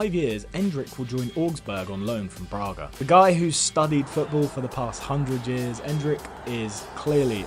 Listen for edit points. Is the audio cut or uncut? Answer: uncut